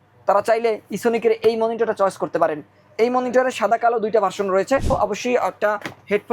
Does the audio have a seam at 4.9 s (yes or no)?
yes